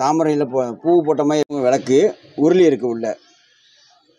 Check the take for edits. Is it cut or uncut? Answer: cut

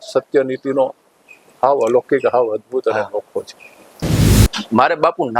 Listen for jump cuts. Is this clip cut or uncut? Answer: cut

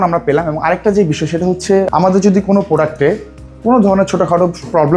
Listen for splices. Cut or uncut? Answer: cut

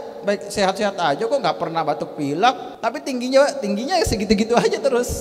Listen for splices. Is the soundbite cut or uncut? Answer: cut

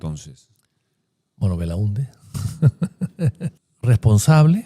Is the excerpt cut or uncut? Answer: cut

